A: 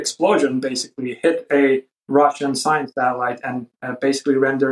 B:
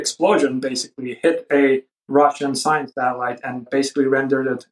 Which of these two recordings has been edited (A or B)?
B